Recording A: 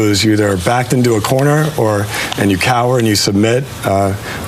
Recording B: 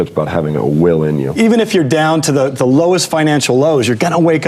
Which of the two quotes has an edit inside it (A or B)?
B